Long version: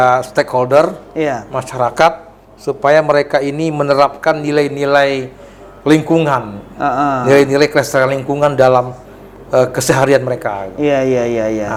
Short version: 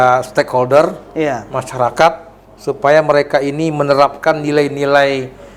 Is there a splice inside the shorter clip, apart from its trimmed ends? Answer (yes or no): no